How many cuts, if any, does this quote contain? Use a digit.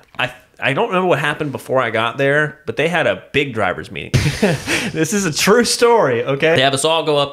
2